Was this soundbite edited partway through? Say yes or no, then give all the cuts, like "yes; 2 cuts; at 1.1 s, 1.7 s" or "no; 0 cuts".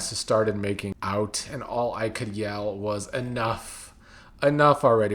yes; 1 cut; at 0.9 s